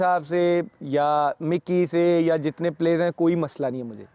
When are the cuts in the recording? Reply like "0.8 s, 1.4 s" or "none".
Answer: none